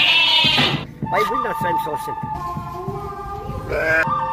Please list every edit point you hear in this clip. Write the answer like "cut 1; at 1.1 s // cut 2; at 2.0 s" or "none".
cut 1; at 2.4 s